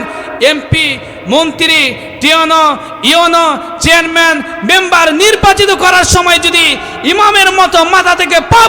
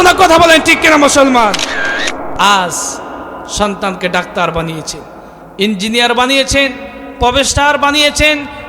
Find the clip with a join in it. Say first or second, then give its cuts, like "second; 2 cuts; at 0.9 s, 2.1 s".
second; 1 cut; at 2.2 s